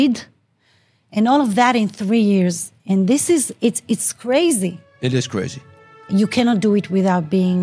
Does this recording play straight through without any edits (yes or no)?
no